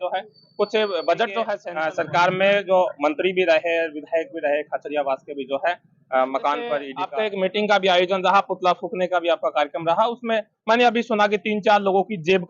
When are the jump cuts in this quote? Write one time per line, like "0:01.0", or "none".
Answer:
0:01.7
0:07.0

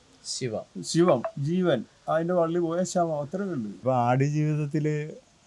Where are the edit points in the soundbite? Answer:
0:03.8

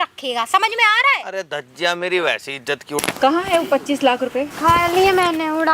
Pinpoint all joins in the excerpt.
0:02.9
0:04.5

